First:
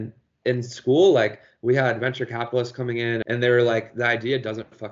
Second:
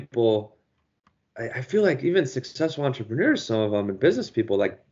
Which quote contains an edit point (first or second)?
first